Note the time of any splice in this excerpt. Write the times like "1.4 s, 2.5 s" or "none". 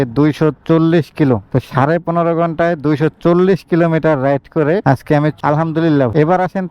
1.5 s, 5.4 s